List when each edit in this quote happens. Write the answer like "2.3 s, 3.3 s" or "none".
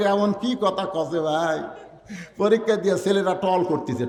none